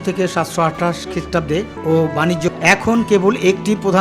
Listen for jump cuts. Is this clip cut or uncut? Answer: cut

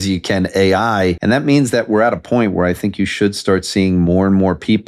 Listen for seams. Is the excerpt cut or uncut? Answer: cut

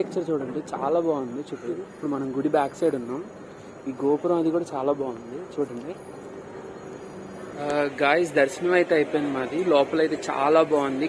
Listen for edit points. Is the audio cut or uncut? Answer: cut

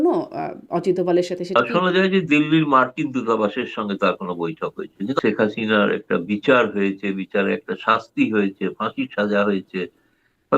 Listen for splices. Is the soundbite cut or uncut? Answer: cut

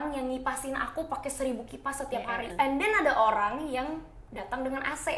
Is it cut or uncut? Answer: cut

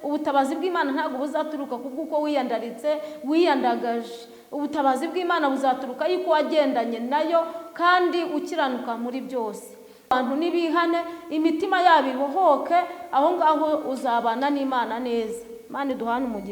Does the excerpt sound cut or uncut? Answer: cut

